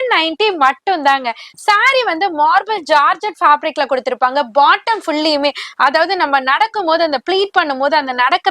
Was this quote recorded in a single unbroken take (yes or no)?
yes